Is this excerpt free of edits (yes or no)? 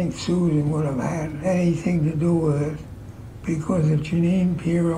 yes